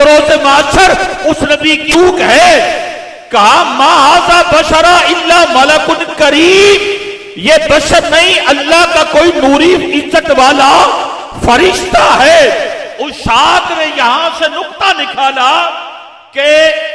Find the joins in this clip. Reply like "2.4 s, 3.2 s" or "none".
1.9 s